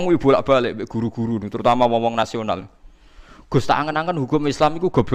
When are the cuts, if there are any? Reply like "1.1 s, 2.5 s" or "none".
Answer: none